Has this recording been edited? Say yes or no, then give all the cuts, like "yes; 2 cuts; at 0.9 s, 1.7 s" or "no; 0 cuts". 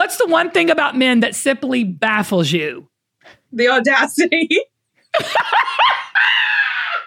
no; 0 cuts